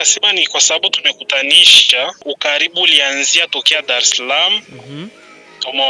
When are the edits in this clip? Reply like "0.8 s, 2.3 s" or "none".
2.2 s

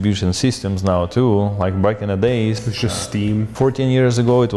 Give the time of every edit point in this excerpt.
none

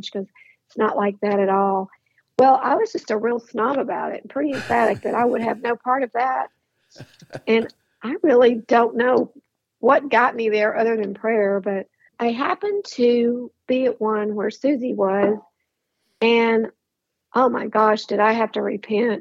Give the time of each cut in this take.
12.0 s

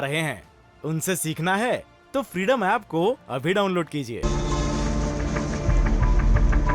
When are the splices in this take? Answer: 4.2 s

